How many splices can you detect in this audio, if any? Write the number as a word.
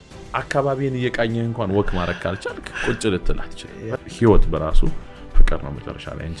one